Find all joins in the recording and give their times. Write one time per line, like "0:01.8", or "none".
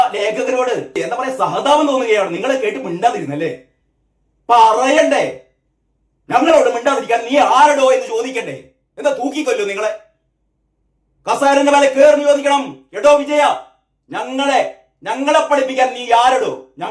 0:00.9